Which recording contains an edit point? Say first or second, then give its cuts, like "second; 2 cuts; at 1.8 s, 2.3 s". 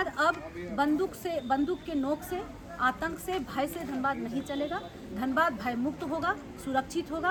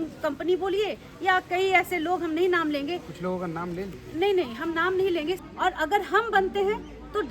second; 1 cut; at 5.5 s